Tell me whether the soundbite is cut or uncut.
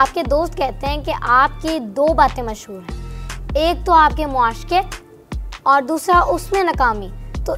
uncut